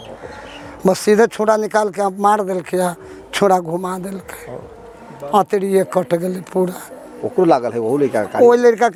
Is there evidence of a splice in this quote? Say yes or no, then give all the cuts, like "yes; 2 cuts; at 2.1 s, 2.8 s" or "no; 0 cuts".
no; 0 cuts